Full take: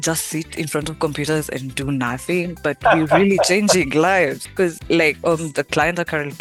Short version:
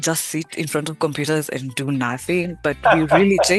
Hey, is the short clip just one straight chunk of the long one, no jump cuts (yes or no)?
yes